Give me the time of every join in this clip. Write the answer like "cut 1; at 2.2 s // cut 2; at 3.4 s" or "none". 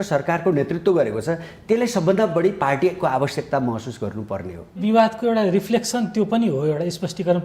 cut 1; at 4.8 s